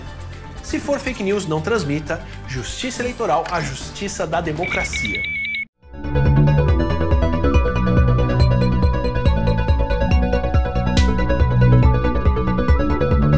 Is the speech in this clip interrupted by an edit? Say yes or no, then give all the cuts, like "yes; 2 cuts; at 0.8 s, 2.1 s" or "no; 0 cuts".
yes; 1 cut; at 5.7 s